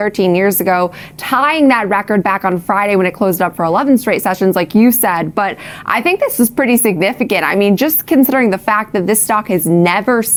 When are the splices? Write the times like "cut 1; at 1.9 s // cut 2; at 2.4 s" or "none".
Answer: none